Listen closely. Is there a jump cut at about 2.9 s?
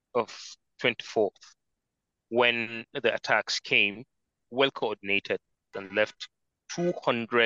no; 2 cuts; at 4.4 s, 5.8 s

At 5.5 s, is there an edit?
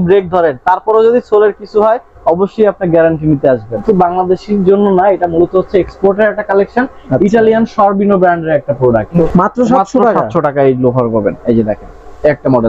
no; 2 cuts; at 3.8 s, 9.2 s

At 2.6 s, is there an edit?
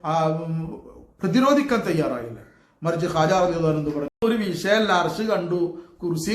no; 1 cut; at 4.2 s

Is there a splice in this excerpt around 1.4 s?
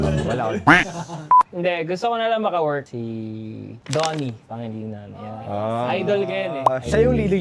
yes; 1 cut; at 1.4 s

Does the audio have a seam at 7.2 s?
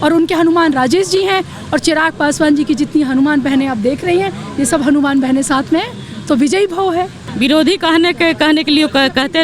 yes; 1 cut; at 7.2 s

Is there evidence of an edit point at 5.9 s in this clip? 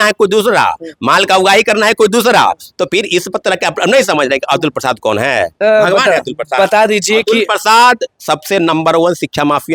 no; 0 cuts

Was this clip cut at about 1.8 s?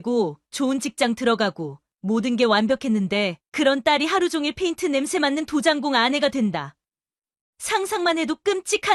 no; 0 cuts

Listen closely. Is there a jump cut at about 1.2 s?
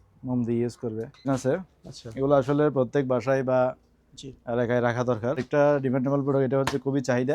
yes; 2 cuts; at 1.2 s, 5.4 s

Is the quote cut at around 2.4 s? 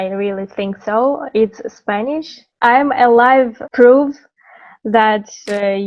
yes; 2 cuts; at 2.4 s, 3.6 s

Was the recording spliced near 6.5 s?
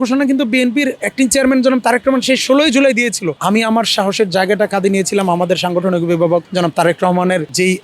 no; 2 cuts; at 1.0 s, 3.3 s

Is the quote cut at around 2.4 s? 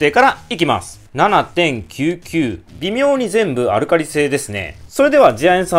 no; 1 cut; at 1.0 s

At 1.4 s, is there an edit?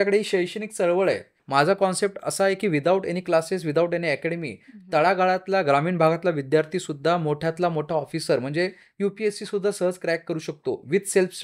yes; 1 cut; at 1.4 s

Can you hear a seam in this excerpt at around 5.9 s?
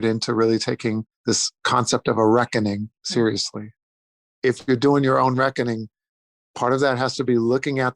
no; 3 cuts; at 1.5 s, 3.0 s, 4.0 s

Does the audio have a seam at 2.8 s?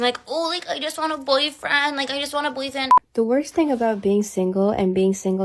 yes; 1 cut; at 2.8 s

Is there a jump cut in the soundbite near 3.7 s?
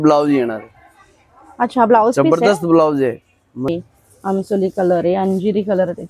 yes; 1 cut; at 3.7 s

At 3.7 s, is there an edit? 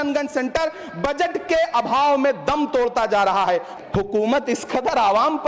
yes; 1 cut; at 3.7 s

